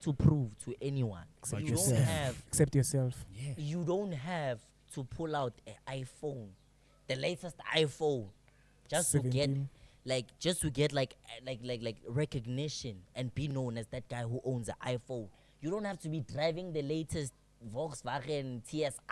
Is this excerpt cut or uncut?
uncut